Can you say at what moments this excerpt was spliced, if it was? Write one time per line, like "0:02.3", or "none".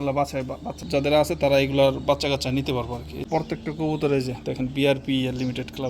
0:00.8
0:03.1